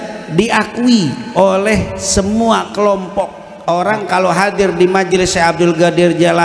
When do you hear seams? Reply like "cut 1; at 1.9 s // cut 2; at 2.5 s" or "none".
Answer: cut 1; at 3.4 s

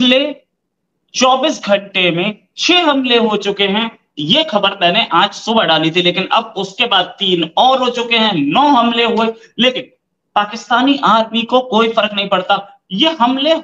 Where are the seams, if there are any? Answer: none

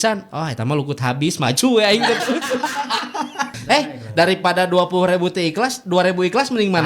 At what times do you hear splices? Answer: cut 1; at 3.6 s

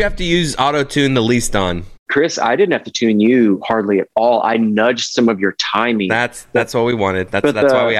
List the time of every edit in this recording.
cut 1; at 2.0 s

